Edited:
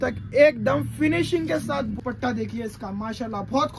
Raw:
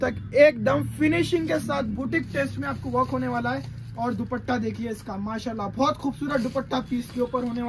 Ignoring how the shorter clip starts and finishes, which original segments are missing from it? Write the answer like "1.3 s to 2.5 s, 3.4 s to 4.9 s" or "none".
2.0 s to 4.3 s